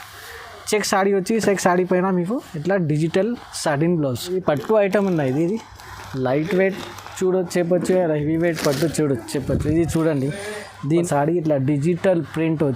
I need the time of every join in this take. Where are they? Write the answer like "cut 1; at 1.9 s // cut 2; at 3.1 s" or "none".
cut 1; at 4.3 s // cut 2; at 11.0 s